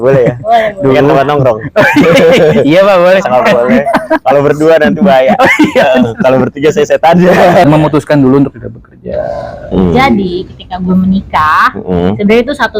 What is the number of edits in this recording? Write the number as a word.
one